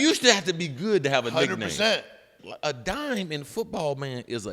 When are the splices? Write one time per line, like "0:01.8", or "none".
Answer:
0:02.4